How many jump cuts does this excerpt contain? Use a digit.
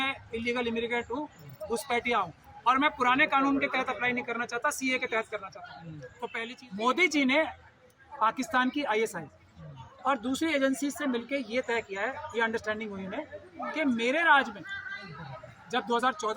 1